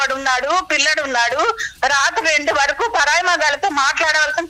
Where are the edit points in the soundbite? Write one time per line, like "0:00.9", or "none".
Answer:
none